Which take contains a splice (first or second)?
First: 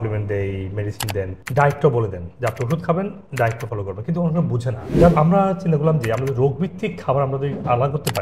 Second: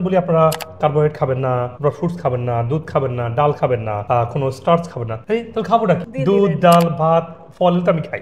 first